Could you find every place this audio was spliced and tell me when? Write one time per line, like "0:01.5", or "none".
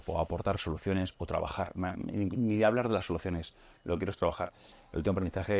0:04.7

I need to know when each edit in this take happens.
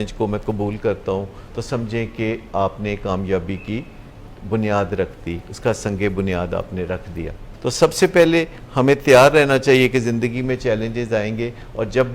0:07.5

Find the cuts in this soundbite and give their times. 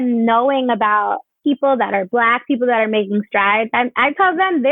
0:01.3

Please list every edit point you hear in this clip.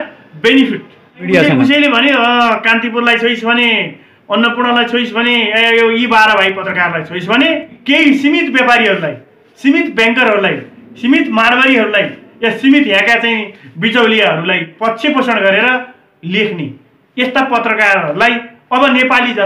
0:01.3
0:06.7
0:07.8
0:14.7

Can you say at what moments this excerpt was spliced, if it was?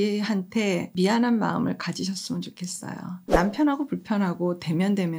0:00.9
0:03.2

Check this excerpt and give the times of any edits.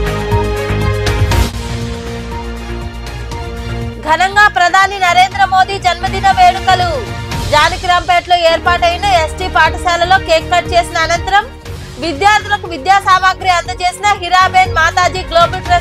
0:01.2

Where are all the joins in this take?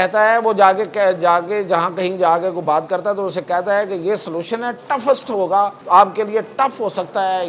0:05.8

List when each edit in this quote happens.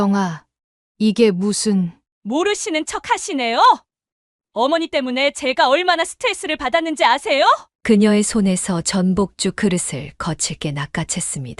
0:07.7

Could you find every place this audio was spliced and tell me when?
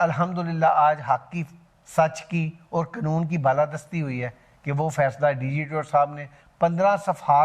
none

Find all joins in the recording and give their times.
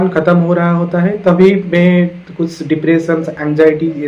none

